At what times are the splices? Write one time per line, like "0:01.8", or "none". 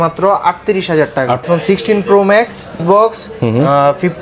0:01.4
0:02.8